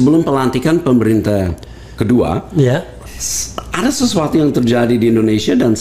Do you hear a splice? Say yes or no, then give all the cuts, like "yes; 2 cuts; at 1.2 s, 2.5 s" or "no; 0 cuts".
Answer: no; 0 cuts